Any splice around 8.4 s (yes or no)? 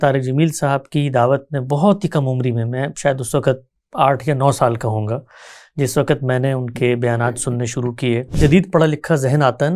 yes